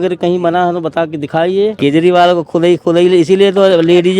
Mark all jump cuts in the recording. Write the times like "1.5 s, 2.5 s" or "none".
1.8 s